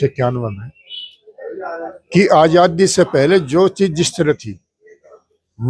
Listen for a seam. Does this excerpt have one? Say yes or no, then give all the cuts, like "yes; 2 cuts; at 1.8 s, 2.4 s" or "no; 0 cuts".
no; 0 cuts